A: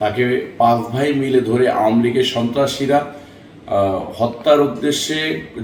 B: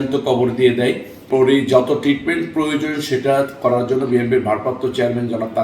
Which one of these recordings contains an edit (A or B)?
B